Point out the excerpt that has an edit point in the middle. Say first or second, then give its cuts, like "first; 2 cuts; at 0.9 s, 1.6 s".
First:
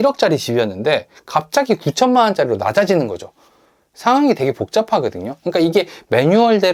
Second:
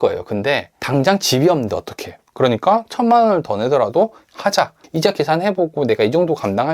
second; 1 cut; at 4.8 s